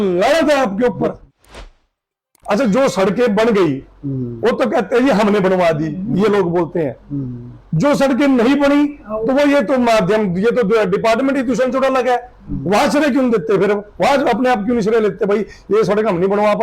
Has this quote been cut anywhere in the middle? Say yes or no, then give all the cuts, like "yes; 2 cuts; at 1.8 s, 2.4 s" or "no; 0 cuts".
yes; 1 cut; at 1.8 s